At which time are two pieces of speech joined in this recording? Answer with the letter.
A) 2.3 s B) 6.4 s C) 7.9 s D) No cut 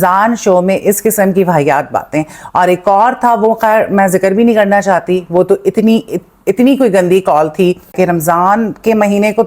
C